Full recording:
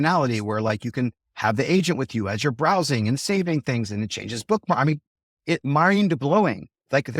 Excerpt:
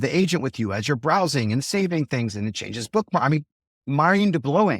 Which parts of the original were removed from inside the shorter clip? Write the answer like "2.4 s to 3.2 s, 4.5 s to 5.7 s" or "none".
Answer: 5.4 s to 5.6 s